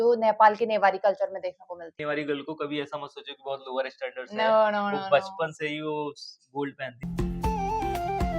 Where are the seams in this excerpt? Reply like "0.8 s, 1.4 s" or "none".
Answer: 2.0 s, 7.0 s